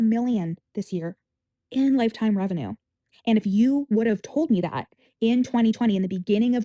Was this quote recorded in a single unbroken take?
yes; 0 cuts

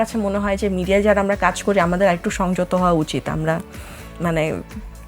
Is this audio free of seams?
yes; 0 cuts

